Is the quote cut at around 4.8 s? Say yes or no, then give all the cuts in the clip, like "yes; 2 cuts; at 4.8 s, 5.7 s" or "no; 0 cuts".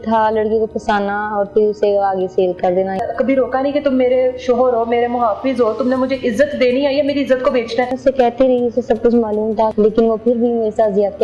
no; 3 cuts; at 3.0 s, 8.0 s, 9.7 s